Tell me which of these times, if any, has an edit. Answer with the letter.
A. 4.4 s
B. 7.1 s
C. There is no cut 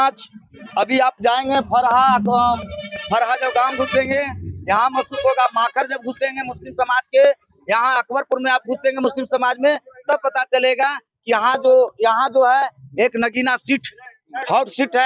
C